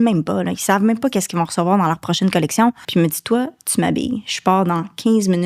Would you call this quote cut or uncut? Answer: cut